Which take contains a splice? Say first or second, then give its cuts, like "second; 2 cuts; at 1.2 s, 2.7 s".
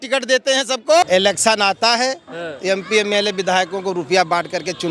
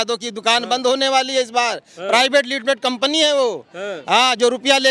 first; 1 cut; at 1.0 s